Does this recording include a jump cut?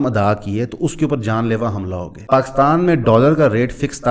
yes; 1 cut; at 2.1 s

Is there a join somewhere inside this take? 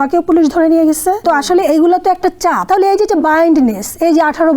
yes; 2 cuts; at 1.2 s, 2.6 s

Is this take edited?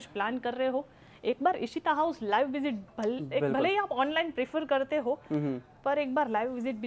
no; 0 cuts

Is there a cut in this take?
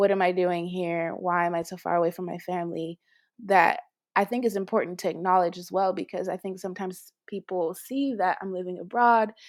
no; 0 cuts

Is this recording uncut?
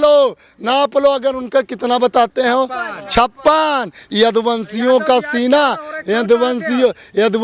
yes; 0 cuts

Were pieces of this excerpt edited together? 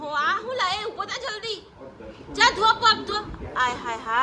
no; 0 cuts

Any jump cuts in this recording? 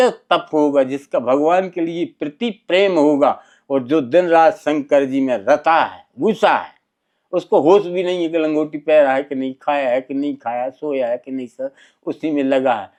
no; 0 cuts

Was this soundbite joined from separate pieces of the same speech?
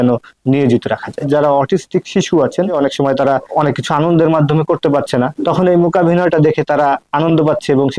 yes; 3 cuts; at 1.3 s, 3.3 s, 5.3 s

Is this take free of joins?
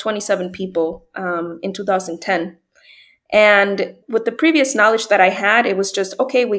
no; 1 cut; at 4.0 s

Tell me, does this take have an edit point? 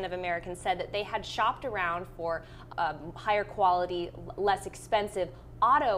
yes; 1 cut; at 2.6 s

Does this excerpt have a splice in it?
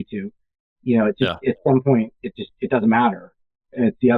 no; 0 cuts

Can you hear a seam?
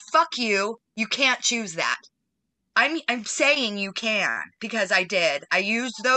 no; 0 cuts

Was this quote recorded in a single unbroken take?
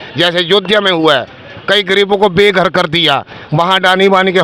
yes; 0 cuts

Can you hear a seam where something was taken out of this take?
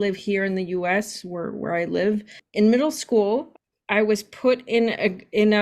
yes; 2 cuts; at 2.4 s, 3.5 s

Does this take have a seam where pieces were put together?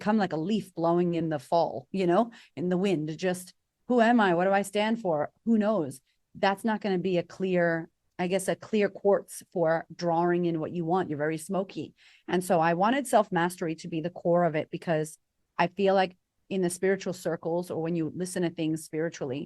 yes; 1 cut; at 8.0 s

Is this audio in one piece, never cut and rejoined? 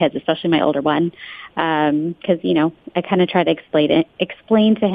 yes; 0 cuts

